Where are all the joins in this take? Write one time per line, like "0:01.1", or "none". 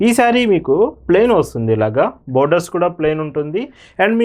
none

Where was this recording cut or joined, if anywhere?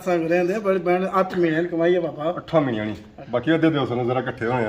0:03.1

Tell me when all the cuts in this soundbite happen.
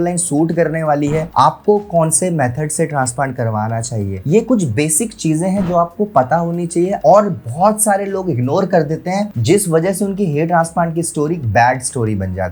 none

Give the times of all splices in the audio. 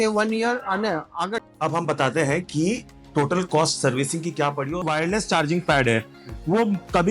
0:01.4
0:04.9

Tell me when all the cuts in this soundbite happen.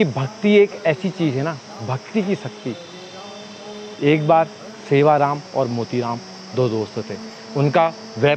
none

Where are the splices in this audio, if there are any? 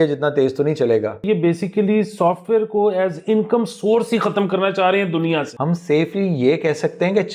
0:01.2
0:05.5

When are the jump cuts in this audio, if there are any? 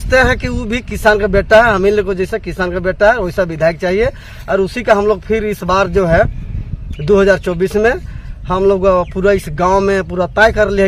none

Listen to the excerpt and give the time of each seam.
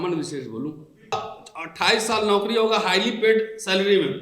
0:01.1

